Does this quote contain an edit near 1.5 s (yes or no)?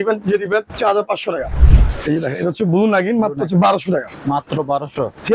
yes